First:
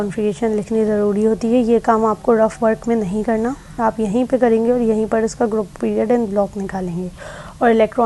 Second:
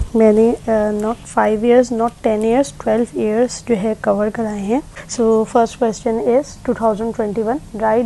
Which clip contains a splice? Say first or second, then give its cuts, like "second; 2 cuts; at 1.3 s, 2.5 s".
second; 1 cut; at 5.0 s